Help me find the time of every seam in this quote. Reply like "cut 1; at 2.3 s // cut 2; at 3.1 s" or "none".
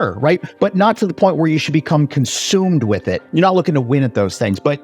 cut 1; at 3.2 s